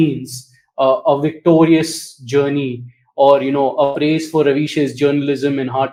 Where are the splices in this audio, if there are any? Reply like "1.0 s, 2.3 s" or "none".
none